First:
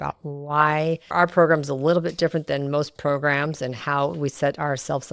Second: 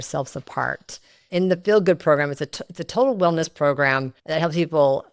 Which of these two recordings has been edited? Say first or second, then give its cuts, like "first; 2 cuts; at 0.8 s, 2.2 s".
second; 2 cuts; at 1.3 s, 4.1 s